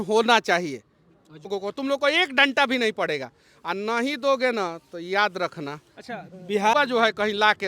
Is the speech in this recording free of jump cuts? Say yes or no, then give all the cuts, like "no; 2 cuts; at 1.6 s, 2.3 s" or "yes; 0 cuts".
no; 2 cuts; at 1.5 s, 6.7 s